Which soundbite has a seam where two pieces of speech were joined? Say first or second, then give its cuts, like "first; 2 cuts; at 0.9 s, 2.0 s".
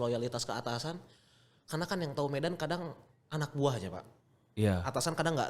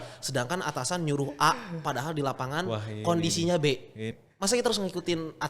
second; 1 cut; at 4.2 s